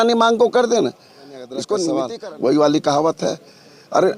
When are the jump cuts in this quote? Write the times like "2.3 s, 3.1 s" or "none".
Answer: 2.1 s